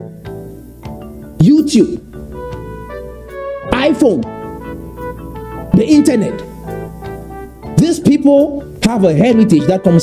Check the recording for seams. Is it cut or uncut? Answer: cut